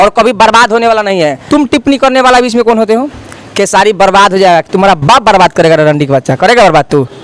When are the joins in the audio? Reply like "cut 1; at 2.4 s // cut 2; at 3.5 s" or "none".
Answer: cut 1; at 1.4 s